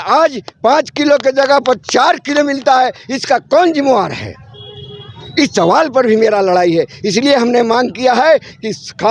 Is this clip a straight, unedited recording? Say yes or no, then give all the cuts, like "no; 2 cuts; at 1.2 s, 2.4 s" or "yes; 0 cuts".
yes; 0 cuts